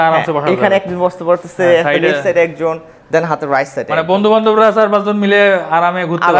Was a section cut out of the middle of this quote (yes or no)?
no